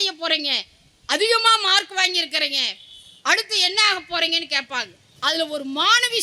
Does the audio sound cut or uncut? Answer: cut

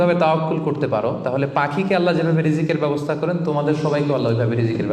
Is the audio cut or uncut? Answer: uncut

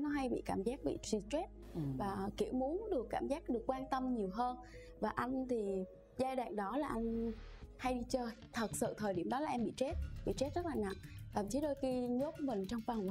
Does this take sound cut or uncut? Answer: uncut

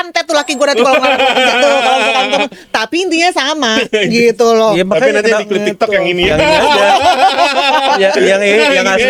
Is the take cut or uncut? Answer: uncut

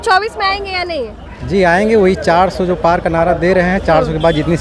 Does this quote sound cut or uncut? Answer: uncut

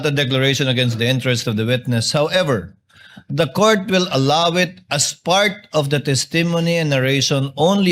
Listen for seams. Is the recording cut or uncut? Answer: uncut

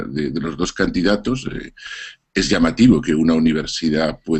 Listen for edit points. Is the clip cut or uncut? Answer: cut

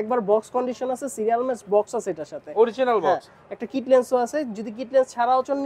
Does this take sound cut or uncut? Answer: uncut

